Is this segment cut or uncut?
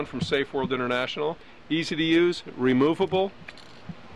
cut